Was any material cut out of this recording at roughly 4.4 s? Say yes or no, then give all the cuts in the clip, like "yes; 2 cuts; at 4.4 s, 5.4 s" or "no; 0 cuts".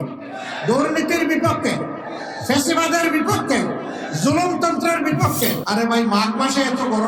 no; 1 cut; at 5.6 s